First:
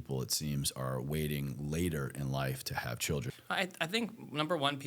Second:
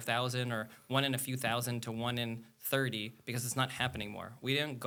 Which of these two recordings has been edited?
first; 1 cut; at 3.3 s

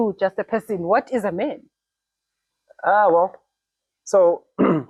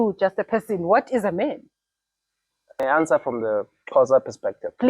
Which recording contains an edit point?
second; 1 cut; at 2.8 s

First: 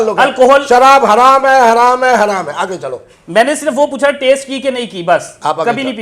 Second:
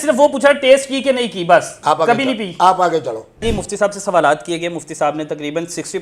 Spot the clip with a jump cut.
second; 1 cut; at 3.4 s

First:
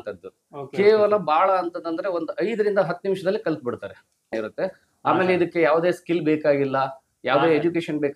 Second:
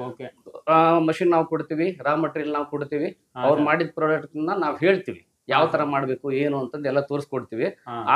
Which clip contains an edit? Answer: first; 1 cut; at 4.3 s

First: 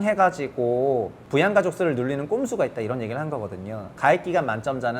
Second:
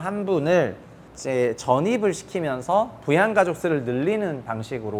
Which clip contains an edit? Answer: first; 2 cuts; at 1.2 s, 3.8 s

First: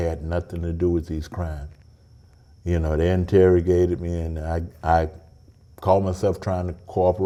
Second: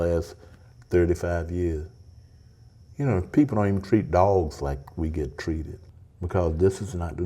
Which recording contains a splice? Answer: second; 1 cut; at 5.8 s

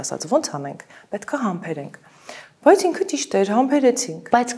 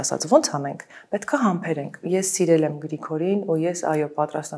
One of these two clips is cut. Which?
second; 1 cut; at 2.0 s

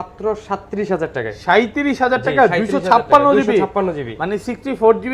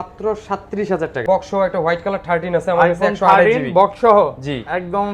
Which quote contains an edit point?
second; 1 cut; at 1.2 s

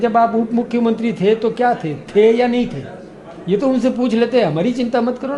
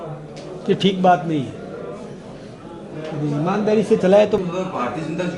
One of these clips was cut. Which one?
second; 1 cut; at 4.4 s

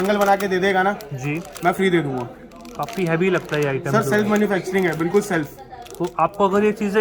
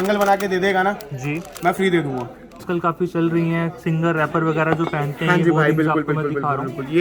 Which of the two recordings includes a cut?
second; 1 cut; at 2.6 s

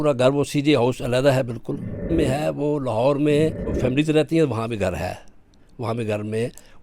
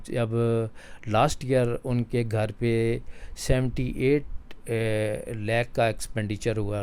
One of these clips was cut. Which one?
first; 2 cuts; at 2.1 s, 3.7 s

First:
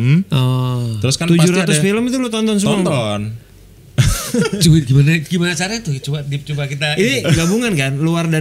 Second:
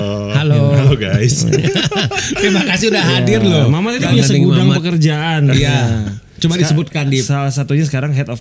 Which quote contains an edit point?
second; 1 cut; at 4.1 s

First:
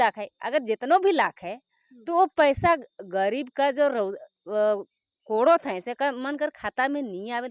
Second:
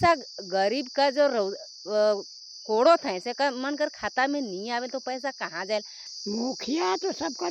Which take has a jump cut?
second; 1 cut; at 6.0 s

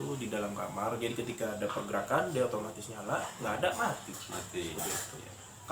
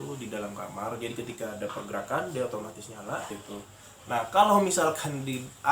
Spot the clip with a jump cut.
second; 1 cut; at 3.3 s

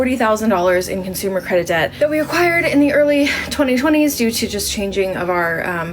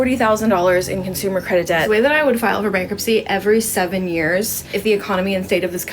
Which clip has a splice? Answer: second; 2 cuts; at 1.8 s, 4.6 s

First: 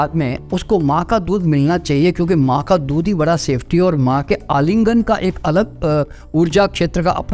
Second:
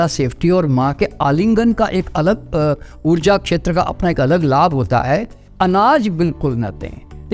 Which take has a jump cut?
second; 1 cut; at 5.4 s

